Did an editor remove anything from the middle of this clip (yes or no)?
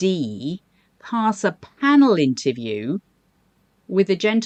no